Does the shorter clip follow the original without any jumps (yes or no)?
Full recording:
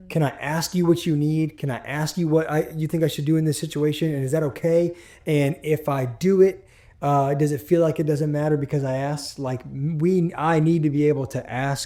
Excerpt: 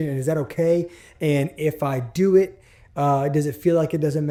yes